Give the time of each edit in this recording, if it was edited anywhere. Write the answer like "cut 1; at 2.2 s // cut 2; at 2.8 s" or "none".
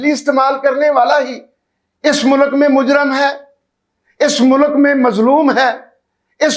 none